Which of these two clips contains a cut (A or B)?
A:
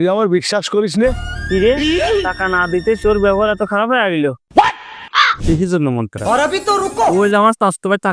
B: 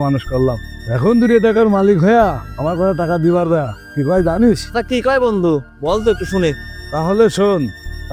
A